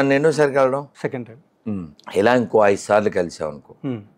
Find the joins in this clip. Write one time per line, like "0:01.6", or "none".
0:00.9